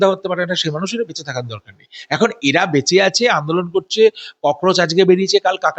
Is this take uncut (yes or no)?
yes